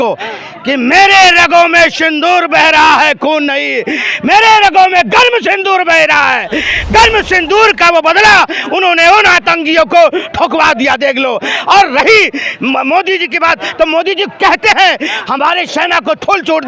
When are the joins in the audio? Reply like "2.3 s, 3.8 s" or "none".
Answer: none